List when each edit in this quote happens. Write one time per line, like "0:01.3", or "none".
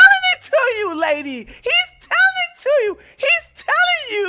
none